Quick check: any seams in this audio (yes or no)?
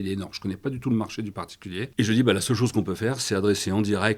yes